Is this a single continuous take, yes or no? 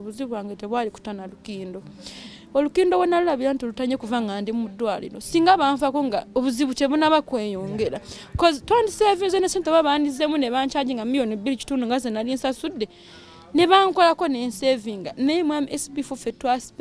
yes